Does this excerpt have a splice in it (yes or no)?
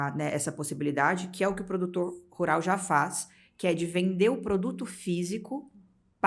no